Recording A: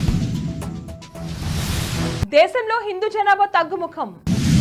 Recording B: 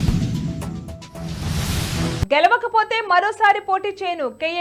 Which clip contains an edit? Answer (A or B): B